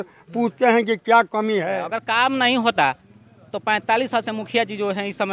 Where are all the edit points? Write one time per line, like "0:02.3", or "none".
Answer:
0:02.0